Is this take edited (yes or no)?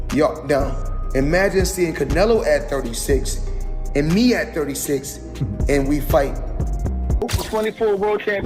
yes